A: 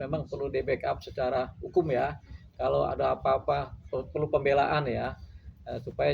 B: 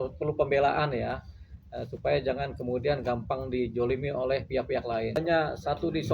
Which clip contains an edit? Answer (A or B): B